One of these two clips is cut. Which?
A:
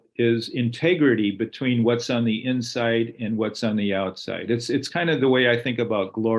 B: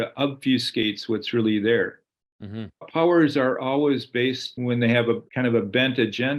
B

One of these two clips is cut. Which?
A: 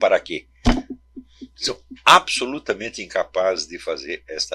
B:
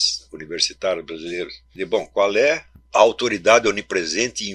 B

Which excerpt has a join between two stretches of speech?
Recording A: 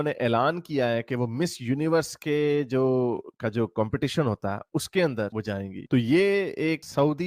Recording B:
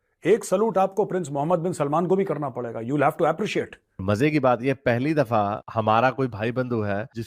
B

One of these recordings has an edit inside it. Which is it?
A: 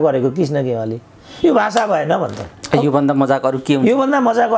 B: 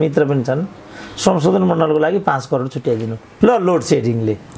B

